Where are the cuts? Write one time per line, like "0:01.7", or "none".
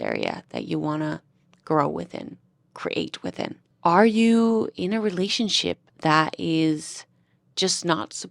none